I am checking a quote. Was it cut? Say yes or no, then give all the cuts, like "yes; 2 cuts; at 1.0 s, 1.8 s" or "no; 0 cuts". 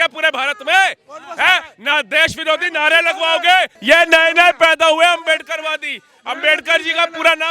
yes; 1 cut; at 3.8 s